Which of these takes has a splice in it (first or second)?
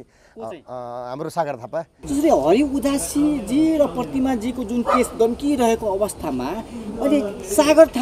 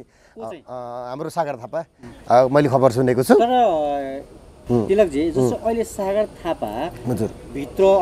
first